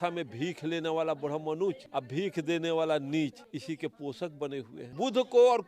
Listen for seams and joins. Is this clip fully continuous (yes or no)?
no